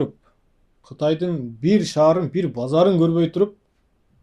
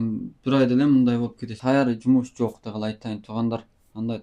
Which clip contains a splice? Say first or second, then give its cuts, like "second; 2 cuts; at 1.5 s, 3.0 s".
second; 1 cut; at 1.6 s